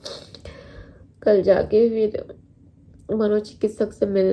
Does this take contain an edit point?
no; 0 cuts

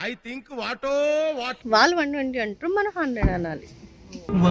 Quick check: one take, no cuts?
no; 1 cut; at 1.6 s

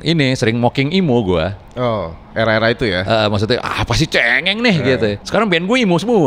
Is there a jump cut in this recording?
yes; 1 cut; at 5.2 s

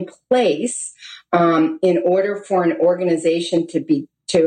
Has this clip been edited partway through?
no; 0 cuts

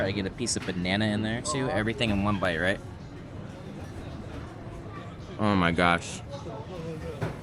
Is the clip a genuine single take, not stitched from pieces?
yes; 0 cuts

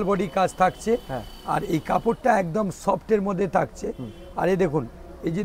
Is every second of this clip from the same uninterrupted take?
yes; 0 cuts

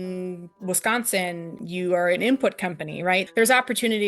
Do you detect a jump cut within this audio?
yes; 2 cuts; at 1.5 s, 3.2 s

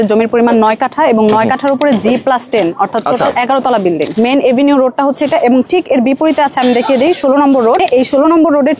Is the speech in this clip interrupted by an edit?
yes; 2 cuts; at 4.1 s, 7.8 s

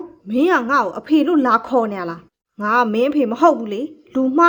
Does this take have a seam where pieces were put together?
no; 0 cuts

